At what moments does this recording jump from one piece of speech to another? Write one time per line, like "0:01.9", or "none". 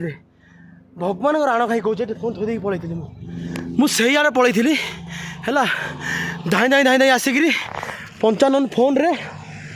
none